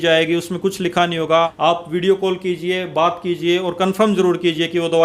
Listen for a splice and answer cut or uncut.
cut